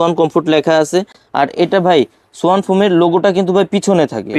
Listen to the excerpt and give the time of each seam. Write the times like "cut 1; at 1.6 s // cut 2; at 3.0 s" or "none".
none